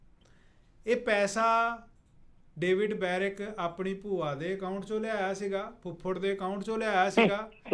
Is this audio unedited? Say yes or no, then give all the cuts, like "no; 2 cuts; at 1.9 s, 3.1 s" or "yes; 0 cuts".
yes; 0 cuts